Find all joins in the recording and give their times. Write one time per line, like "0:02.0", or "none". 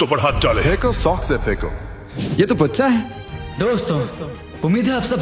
0:02.2